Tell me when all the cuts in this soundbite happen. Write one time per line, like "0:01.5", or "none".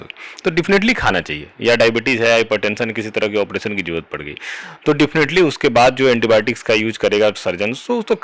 none